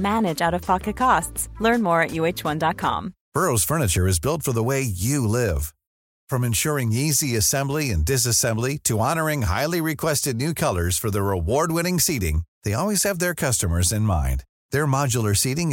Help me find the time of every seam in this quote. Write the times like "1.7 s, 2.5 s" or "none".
3.2 s